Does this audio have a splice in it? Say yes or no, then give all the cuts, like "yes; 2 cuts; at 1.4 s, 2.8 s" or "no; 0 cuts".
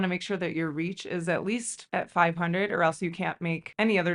no; 0 cuts